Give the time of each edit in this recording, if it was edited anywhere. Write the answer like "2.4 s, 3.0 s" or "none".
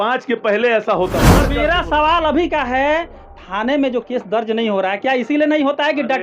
1.2 s

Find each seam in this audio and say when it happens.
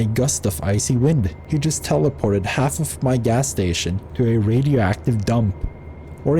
1.4 s, 4.0 s

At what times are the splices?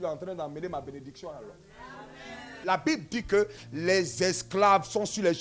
2.6 s

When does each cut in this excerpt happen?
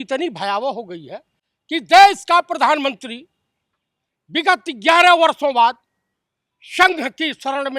none

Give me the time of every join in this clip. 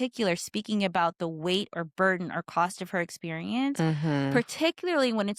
none

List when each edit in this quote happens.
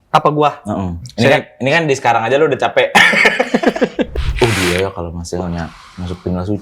1.0 s, 4.1 s

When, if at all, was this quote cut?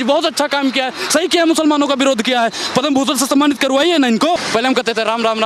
4.4 s

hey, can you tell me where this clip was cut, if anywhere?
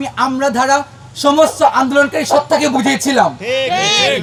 none

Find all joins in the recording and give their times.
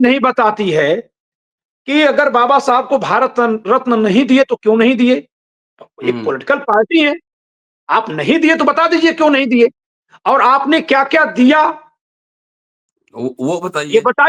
none

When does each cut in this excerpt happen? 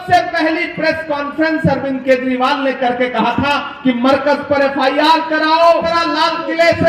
5.9 s

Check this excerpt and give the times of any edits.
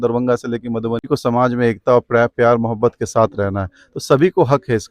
1.0 s

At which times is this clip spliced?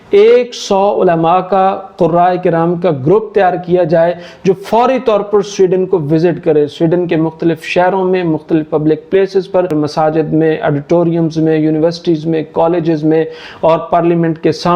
9.7 s

